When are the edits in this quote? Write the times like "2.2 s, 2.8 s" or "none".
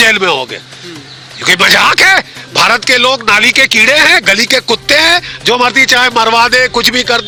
none

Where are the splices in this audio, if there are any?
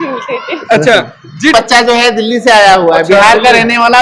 1.5 s

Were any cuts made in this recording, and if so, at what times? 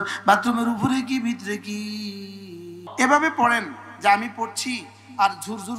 2.8 s

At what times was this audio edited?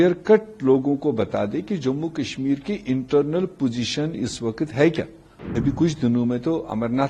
5.5 s

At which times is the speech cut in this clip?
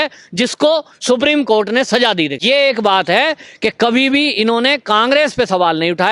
2.4 s

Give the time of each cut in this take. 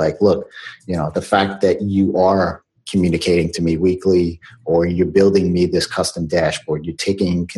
none

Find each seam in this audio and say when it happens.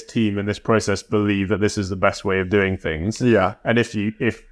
none

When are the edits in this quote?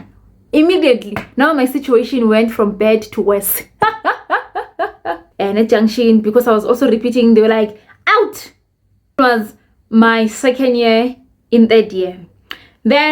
5.1 s, 9.2 s

